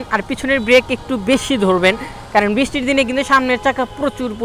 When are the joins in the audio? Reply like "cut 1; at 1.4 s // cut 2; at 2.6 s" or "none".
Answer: none